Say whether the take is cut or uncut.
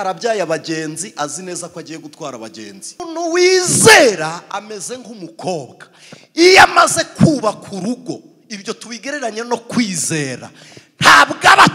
cut